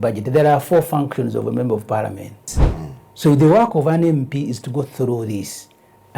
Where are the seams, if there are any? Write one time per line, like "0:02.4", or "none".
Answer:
0:02.5